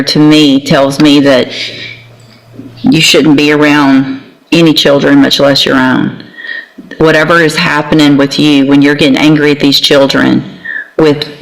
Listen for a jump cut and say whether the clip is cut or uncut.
uncut